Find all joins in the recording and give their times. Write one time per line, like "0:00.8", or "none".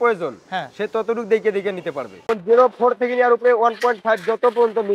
0:02.2